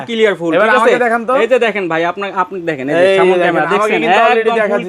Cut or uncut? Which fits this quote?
uncut